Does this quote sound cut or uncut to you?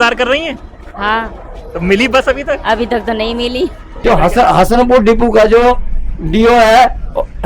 cut